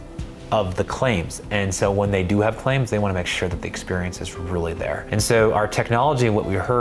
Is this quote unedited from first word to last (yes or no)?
no